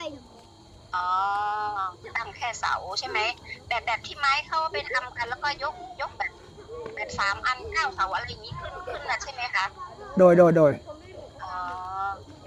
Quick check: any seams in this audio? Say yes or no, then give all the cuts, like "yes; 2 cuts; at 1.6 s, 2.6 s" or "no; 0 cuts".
no; 0 cuts